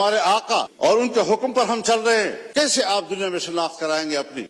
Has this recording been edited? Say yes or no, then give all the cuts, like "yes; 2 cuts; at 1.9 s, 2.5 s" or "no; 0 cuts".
yes; 1 cut; at 2.4 s